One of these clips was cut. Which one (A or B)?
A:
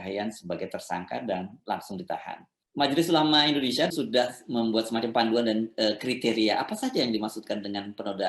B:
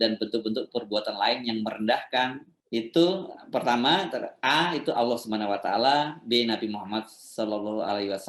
A